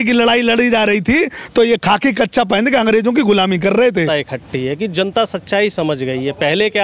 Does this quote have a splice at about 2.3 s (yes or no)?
no